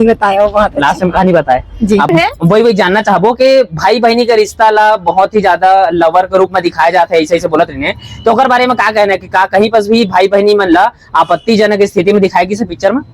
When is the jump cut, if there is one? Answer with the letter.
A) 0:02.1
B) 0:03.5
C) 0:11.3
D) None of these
A